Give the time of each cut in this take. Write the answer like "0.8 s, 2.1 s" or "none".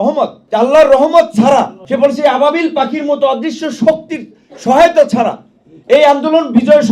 none